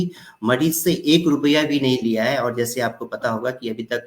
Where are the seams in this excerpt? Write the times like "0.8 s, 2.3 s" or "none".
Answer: none